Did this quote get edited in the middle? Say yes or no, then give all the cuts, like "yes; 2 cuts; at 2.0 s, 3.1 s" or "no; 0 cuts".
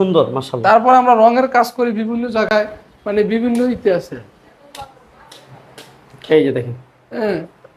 no; 0 cuts